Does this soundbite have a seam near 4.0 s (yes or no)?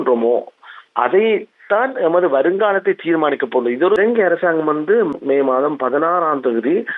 yes